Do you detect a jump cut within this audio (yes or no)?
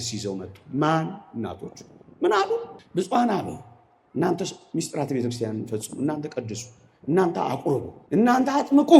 yes